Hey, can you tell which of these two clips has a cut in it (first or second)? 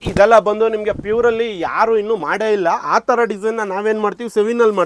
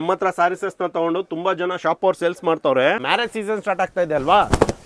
second